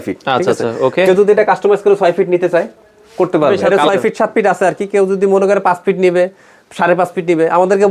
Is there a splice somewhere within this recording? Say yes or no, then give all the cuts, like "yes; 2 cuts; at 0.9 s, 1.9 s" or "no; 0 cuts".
yes; 1 cut; at 3.6 s